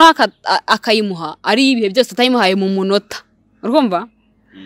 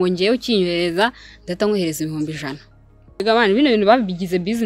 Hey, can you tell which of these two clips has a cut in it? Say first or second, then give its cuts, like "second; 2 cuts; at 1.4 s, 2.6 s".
second; 1 cut; at 3.2 s